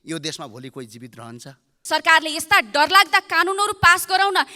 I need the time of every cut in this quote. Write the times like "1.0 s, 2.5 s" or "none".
1.8 s